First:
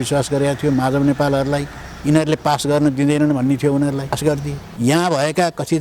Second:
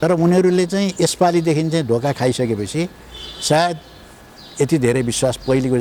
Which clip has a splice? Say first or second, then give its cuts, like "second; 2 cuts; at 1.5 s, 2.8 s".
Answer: first; 1 cut; at 4.4 s